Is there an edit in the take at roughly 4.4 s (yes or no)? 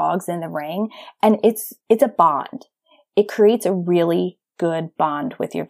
no